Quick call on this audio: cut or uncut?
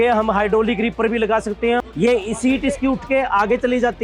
cut